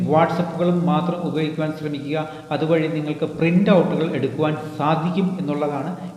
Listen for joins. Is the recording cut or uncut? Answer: uncut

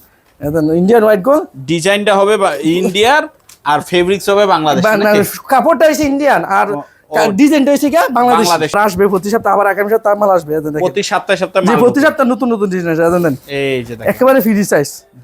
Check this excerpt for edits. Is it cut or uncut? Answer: cut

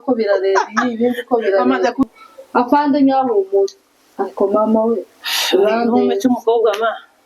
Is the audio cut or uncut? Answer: cut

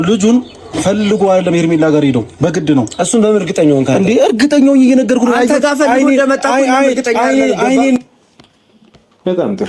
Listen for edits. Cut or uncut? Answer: uncut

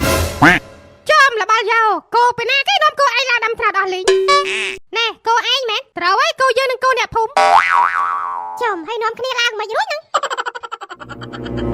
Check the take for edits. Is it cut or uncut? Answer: uncut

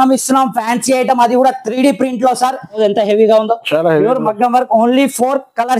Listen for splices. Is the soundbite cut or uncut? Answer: cut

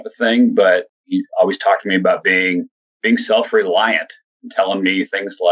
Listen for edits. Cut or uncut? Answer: cut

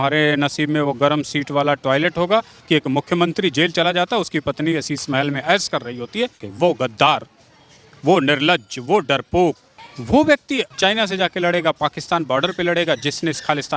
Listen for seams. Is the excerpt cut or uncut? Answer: cut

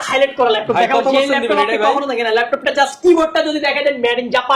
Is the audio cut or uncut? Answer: uncut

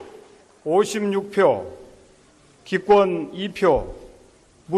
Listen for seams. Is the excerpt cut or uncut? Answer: cut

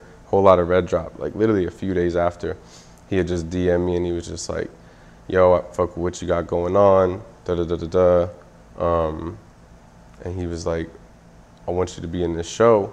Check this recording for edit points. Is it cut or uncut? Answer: uncut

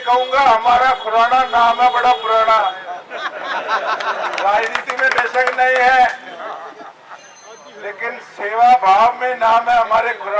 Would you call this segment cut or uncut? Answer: uncut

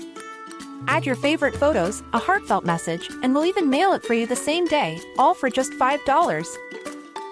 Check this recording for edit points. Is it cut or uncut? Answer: uncut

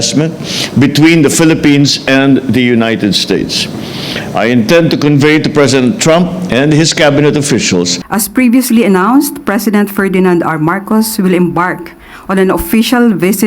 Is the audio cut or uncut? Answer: cut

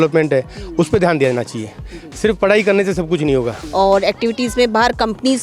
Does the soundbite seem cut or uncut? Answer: cut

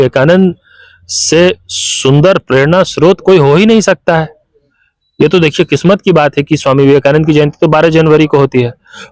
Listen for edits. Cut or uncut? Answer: uncut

